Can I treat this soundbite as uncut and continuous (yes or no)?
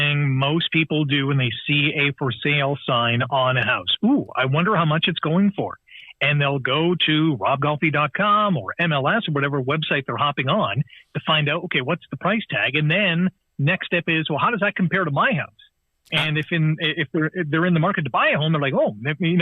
yes